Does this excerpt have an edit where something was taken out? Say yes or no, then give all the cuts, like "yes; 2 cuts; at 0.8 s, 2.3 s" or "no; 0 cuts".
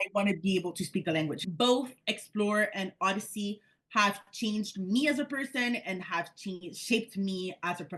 yes; 1 cut; at 1.4 s